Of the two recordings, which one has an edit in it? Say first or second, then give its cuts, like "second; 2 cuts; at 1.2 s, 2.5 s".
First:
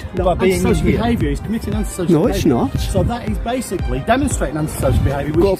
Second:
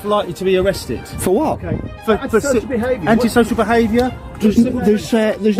second; 1 cut; at 2.6 s